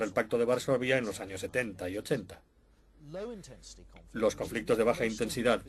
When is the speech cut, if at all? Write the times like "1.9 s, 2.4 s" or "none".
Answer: none